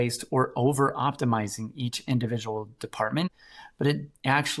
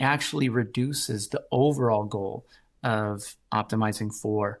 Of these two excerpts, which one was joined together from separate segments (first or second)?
first